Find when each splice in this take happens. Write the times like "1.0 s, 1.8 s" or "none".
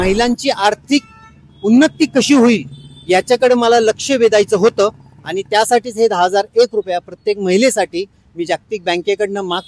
none